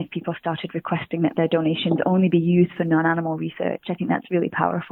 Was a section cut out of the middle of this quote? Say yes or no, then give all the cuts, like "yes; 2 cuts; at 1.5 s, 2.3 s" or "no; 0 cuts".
no; 0 cuts